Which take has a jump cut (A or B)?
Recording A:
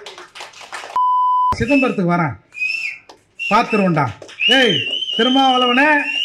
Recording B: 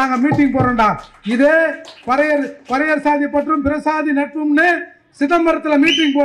A